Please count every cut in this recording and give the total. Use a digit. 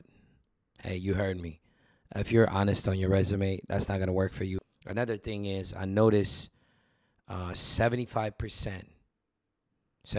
1